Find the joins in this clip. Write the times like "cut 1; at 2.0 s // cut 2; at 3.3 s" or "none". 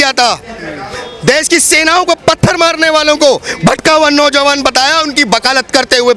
none